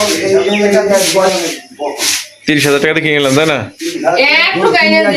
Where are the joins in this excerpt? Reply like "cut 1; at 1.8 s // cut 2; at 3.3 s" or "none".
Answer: cut 1; at 1.3 s